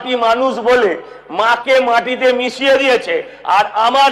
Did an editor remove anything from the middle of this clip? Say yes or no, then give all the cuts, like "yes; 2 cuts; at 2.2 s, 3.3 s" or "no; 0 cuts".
no; 0 cuts